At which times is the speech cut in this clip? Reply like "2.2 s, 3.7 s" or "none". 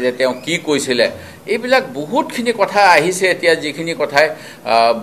none